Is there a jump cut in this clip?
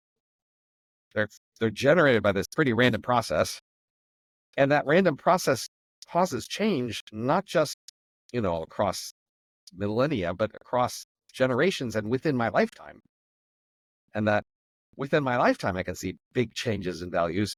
no; 0 cuts

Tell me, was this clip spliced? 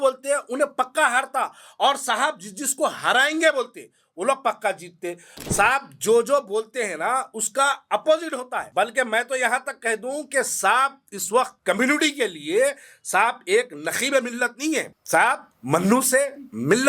yes; 5 cuts; at 5.3 s, 8.6 s, 11.5 s, 15.0 s, 15.5 s

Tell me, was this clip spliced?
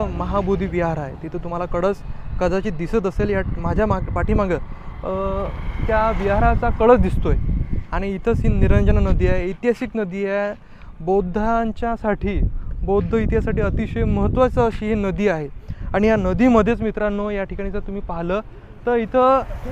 no; 0 cuts

